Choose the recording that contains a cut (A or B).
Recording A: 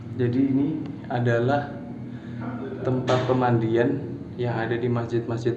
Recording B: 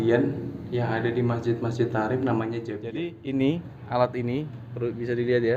B